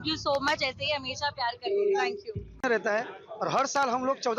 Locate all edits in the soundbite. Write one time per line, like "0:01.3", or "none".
0:02.3